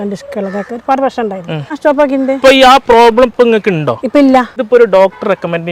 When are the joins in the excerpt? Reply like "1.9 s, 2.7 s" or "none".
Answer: 1.8 s, 4.6 s

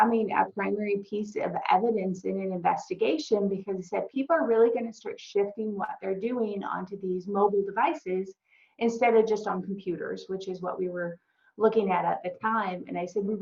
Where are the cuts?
none

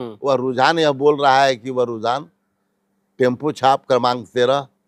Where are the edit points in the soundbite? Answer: none

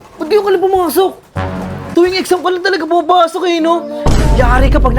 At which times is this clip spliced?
1.7 s

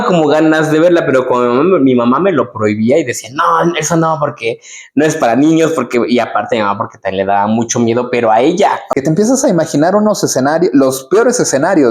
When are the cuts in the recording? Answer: 8.8 s

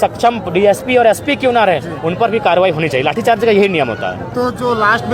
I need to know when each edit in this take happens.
none

